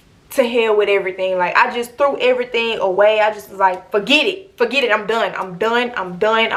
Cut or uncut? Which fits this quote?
uncut